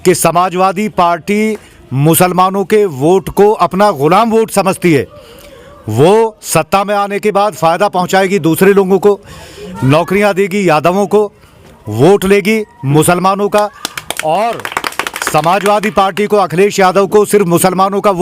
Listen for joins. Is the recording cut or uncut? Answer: uncut